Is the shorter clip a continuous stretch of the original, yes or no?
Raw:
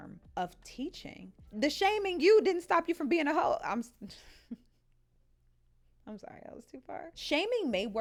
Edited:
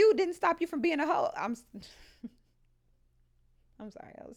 yes